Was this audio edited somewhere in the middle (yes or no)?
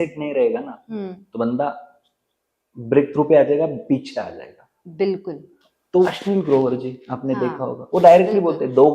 yes